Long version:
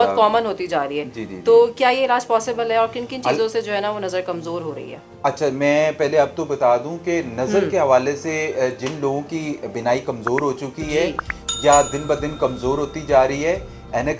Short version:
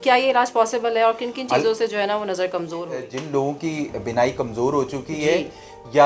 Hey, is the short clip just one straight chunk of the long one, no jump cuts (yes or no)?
no